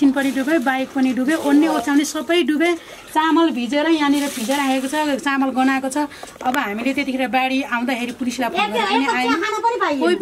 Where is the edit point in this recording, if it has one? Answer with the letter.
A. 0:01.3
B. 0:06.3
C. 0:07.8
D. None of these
D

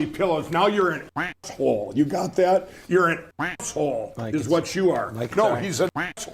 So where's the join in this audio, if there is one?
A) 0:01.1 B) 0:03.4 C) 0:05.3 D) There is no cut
C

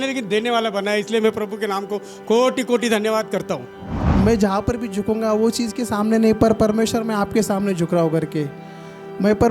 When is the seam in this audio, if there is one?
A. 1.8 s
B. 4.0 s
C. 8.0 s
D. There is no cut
B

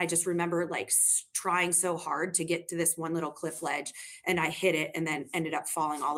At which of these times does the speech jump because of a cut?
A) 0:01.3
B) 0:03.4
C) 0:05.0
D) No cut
D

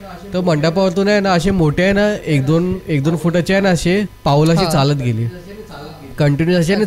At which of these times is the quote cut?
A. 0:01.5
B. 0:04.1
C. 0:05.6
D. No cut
D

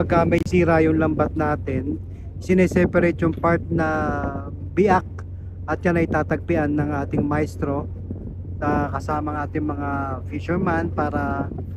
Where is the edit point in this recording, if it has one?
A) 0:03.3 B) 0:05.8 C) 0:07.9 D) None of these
D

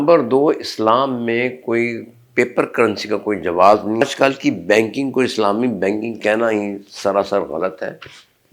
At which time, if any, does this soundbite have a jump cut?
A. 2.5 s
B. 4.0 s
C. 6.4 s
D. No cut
B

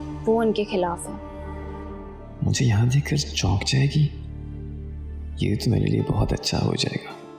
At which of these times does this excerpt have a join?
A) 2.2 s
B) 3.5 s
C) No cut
A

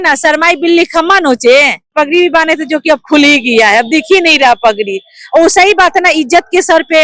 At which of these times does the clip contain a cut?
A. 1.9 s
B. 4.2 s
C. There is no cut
A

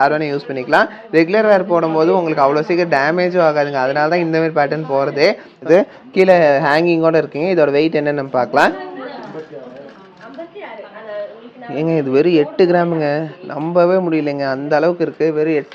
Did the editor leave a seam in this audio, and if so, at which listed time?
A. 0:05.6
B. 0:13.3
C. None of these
A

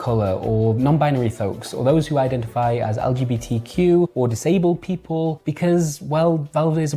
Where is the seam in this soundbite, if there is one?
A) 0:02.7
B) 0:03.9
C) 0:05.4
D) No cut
D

